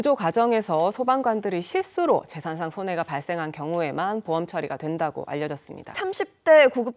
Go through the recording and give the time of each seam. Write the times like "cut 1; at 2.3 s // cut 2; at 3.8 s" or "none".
cut 1; at 6.0 s